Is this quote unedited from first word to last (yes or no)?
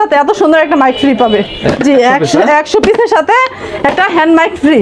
yes